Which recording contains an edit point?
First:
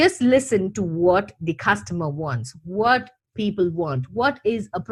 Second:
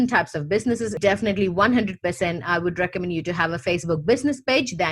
second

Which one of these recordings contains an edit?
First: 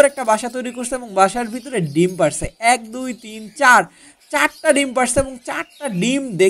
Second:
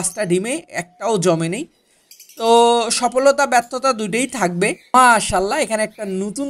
second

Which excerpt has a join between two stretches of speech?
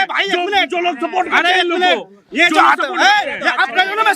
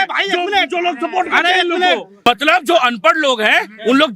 second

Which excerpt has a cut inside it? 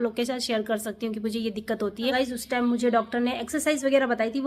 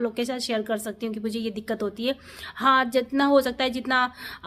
first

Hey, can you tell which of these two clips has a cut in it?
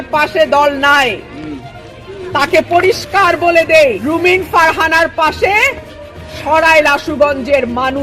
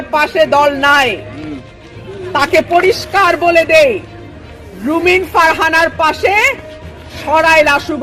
first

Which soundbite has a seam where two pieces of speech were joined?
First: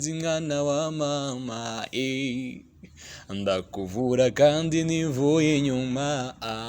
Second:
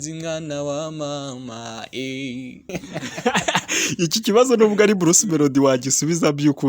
second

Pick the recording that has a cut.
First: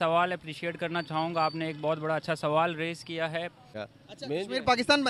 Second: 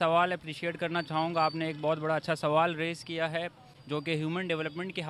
first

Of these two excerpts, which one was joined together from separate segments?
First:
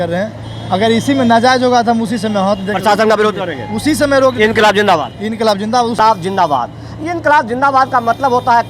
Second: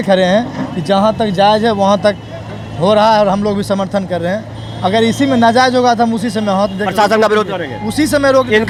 first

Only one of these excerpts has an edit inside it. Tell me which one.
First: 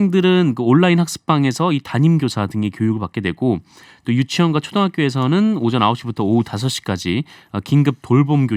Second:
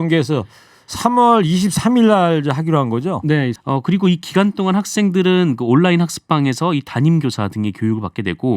second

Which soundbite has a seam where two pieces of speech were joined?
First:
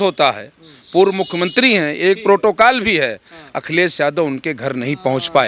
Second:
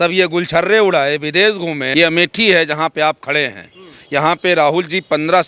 second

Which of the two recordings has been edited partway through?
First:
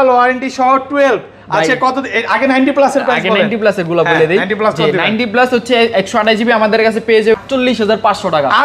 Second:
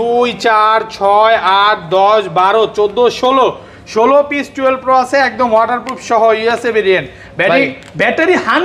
first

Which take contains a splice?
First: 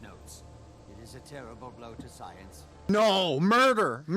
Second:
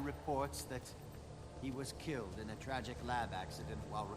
first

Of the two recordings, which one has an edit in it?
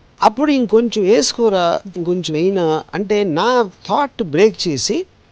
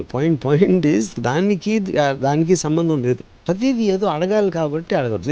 second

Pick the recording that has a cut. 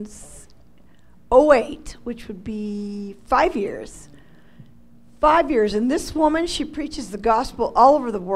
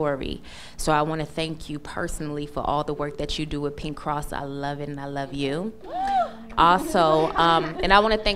second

